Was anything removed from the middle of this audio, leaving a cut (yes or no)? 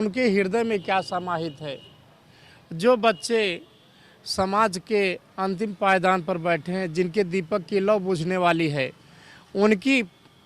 no